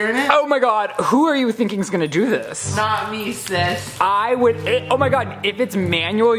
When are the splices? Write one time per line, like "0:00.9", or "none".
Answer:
none